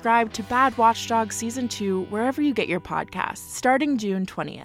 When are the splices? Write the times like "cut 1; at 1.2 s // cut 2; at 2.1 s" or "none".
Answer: cut 1; at 3.4 s